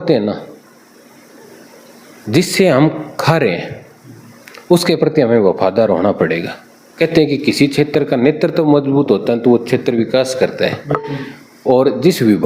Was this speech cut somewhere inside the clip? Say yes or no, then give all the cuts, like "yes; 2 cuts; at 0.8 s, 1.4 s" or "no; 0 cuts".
yes; 1 cut; at 6.9 s